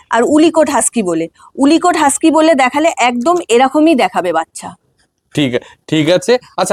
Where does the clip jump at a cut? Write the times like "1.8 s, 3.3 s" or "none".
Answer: none